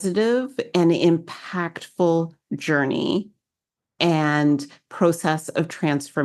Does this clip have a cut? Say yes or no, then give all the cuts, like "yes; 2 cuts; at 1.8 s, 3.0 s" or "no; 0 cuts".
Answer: no; 0 cuts